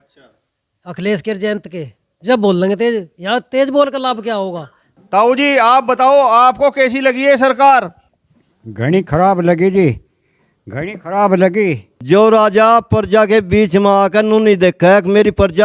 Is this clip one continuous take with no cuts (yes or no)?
no